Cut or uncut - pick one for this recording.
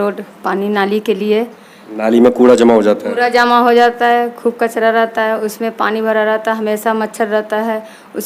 uncut